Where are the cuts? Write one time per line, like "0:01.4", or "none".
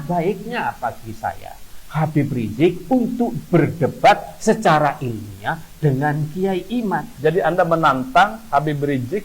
0:07.1

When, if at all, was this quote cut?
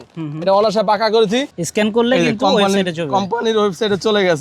0:01.6

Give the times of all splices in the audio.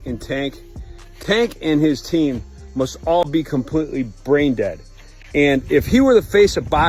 none

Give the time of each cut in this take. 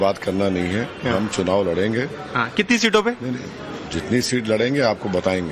none

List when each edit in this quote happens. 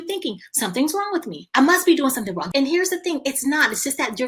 0:01.4
0:02.4

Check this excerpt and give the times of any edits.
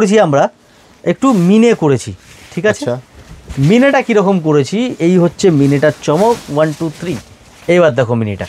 none

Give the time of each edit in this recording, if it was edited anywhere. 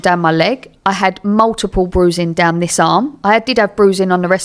none

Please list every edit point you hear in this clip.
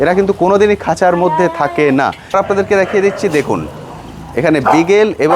0:02.2

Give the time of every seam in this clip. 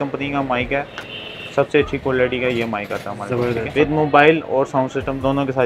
0:03.7

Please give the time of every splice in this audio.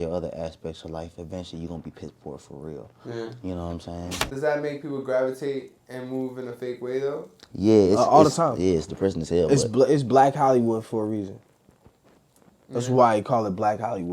0:04.3

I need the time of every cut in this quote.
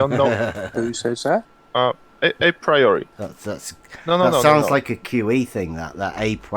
0:01.6
0:03.2

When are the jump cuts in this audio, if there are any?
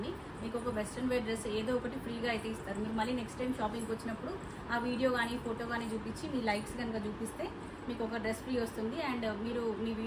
none

